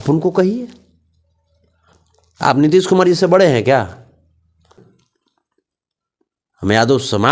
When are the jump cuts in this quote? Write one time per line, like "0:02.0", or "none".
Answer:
0:04.8

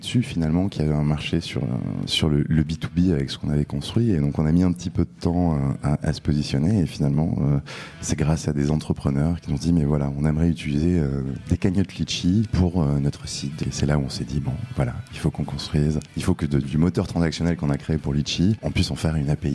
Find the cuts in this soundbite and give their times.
0:02.1
0:09.4
0:12.5
0:13.6
0:16.1
0:18.6

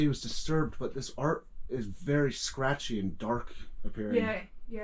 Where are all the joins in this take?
none

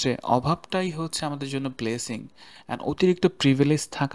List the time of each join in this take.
none

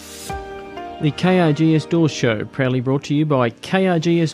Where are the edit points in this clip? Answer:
0:01.0

